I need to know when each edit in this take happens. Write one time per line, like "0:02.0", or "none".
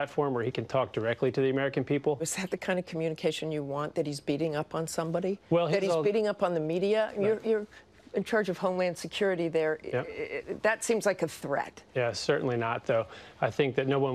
0:02.6